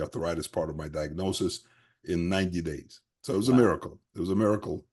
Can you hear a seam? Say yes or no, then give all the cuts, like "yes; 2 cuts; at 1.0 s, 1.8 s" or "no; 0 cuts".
no; 0 cuts